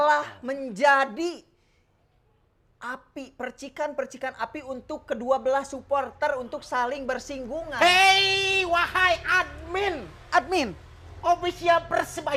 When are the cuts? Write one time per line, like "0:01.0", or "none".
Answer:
none